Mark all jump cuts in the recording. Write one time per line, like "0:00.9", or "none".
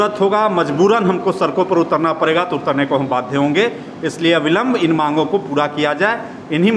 none